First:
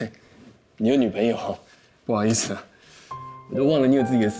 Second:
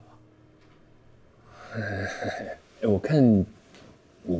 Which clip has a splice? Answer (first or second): second